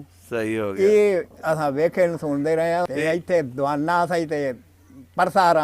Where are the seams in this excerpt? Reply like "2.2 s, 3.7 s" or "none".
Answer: 2.9 s

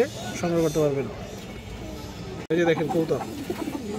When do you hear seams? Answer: 2.5 s

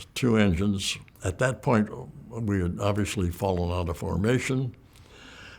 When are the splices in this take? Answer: 1.1 s

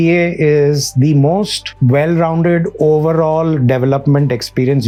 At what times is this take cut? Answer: none

